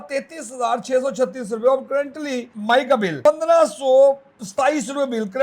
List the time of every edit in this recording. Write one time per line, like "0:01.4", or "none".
0:02.5
0:03.2